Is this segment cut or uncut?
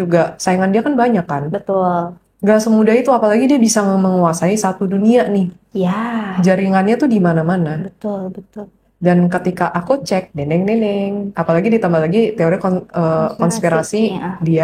uncut